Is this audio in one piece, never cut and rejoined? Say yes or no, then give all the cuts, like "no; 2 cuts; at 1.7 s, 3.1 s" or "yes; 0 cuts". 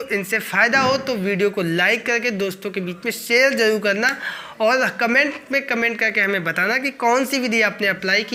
yes; 0 cuts